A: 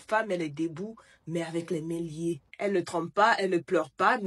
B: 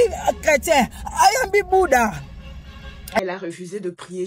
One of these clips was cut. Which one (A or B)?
B